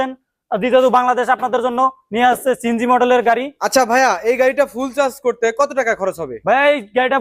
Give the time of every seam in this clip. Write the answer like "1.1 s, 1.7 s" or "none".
3.6 s